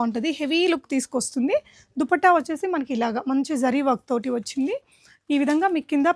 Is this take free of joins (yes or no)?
yes